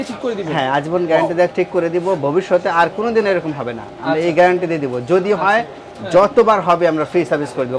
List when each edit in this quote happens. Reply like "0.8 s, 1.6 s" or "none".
none